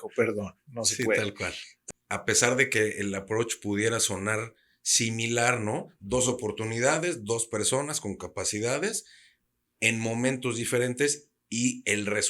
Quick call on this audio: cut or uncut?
cut